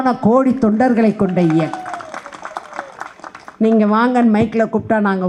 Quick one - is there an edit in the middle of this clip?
no; 0 cuts

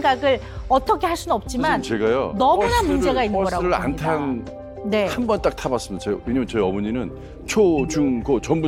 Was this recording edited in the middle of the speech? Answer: no; 0 cuts

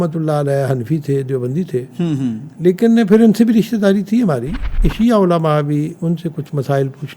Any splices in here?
yes; 1 cut; at 4.9 s

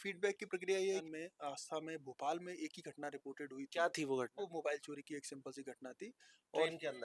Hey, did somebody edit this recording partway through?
yes; 1 cut; at 1.0 s

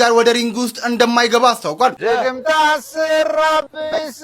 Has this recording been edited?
yes; 1 cut; at 2.0 s

